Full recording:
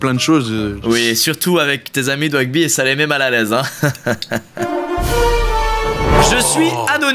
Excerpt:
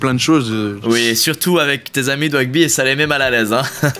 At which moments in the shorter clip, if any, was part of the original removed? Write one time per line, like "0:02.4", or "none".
none